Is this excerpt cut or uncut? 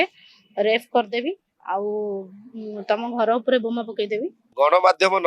cut